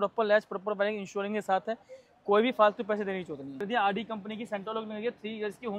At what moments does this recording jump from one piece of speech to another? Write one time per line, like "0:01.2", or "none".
0:03.6